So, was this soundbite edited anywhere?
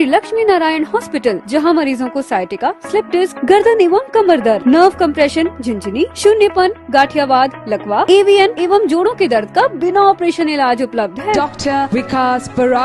no; 0 cuts

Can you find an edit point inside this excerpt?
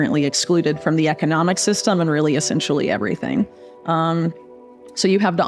no; 0 cuts

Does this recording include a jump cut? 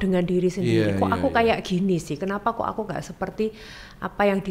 no; 0 cuts

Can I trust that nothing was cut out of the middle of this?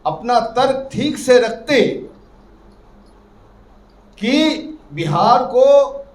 yes; 0 cuts

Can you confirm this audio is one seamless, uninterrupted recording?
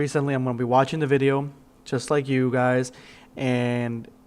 no; 1 cut; at 2.4 s

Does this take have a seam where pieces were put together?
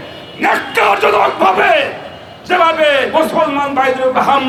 no; 0 cuts

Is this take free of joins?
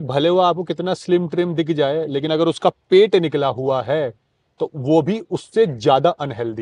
yes; 0 cuts

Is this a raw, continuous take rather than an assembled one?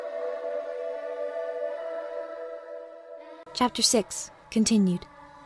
no; 1 cut; at 4.4 s

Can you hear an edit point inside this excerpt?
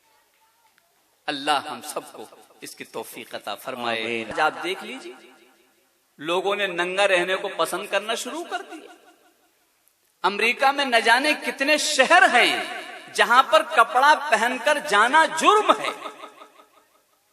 yes; 1 cut; at 4.3 s

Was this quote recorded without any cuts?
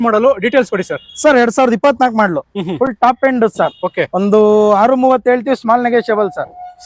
yes; 0 cuts

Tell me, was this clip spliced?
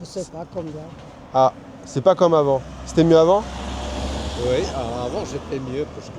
no; 0 cuts

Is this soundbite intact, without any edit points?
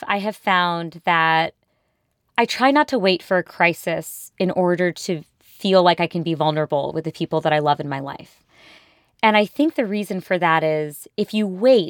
yes; 0 cuts

